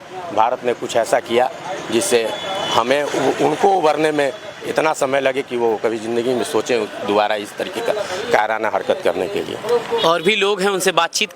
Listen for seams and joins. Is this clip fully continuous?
yes; 0 cuts

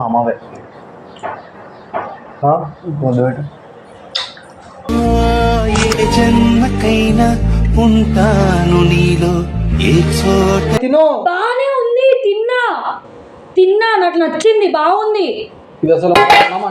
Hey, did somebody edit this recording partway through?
yes; 1 cut; at 10.8 s

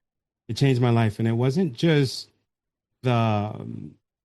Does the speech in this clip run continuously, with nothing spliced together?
yes; 0 cuts

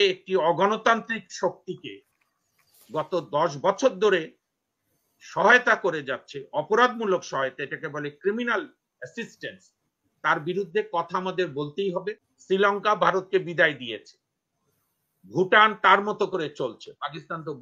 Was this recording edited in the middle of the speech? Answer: yes; 1 cut; at 12.3 s

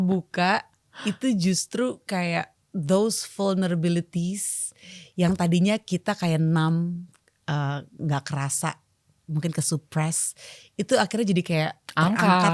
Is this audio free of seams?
yes; 0 cuts

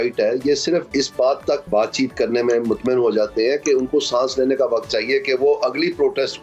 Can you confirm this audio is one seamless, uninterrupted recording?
no; 2 cuts; at 0.9 s, 1.7 s

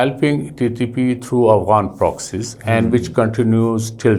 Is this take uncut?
yes; 0 cuts

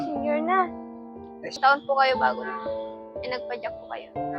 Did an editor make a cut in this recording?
yes; 1 cut; at 1.6 s

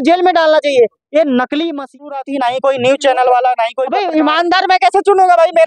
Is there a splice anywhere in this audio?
yes; 2 cuts; at 2.1 s, 3.8 s

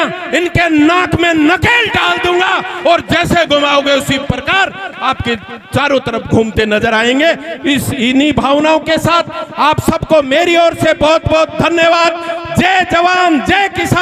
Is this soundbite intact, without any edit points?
yes; 0 cuts

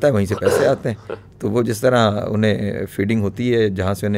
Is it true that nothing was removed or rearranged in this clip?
yes; 0 cuts

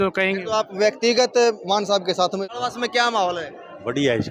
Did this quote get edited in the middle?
yes; 1 cut; at 2.5 s

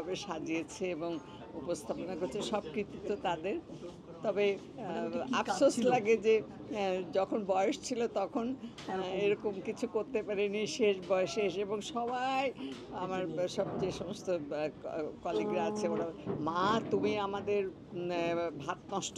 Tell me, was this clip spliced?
no; 0 cuts

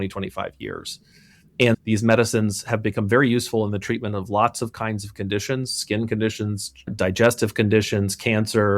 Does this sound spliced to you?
yes; 2 cuts; at 1.8 s, 6.9 s

